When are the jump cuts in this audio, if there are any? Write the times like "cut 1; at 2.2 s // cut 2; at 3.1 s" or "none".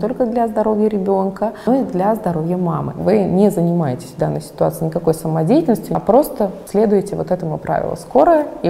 cut 1; at 1.7 s // cut 2; at 2.9 s // cut 3; at 5.9 s